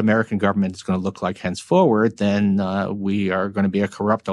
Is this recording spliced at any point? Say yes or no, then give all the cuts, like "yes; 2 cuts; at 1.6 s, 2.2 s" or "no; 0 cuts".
no; 0 cuts